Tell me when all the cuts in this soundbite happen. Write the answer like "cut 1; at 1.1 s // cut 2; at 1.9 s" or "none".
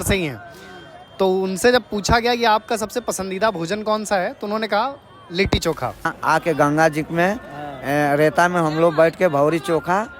cut 1; at 6.1 s